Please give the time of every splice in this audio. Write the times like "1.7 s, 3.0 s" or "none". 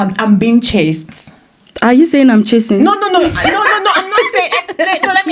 none